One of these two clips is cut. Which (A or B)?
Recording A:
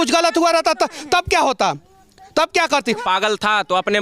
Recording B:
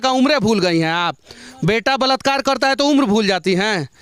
A